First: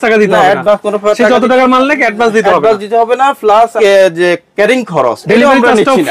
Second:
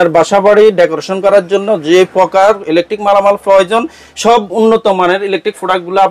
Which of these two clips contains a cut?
first; 1 cut; at 3.7 s

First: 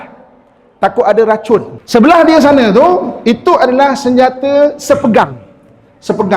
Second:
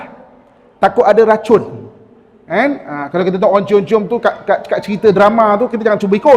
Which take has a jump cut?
first; 1 cut; at 1.8 s

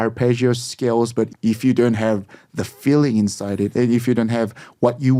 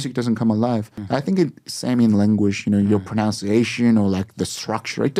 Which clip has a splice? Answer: first; 1 cut; at 1.3 s

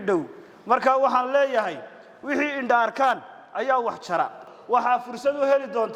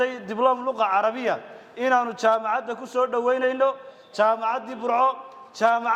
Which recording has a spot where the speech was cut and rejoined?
first; 1 cut; at 4.5 s

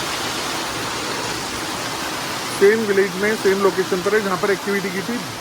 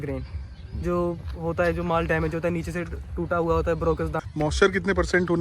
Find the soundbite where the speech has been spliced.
second; 1 cut; at 4.2 s

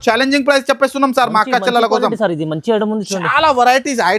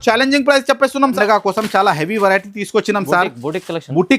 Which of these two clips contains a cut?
second; 1 cut; at 1.1 s

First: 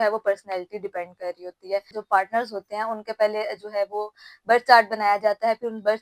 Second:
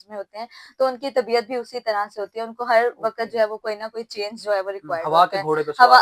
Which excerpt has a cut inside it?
first; 1 cut; at 2.0 s

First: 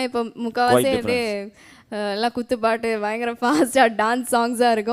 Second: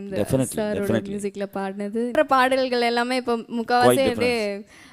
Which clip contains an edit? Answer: second; 1 cut; at 2.1 s

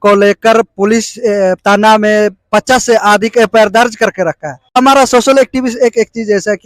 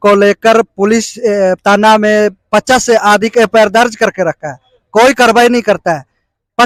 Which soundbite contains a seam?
first; 1 cut; at 4.8 s

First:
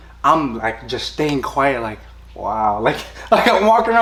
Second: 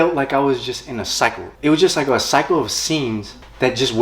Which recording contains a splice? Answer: second; 1 cut; at 1.5 s

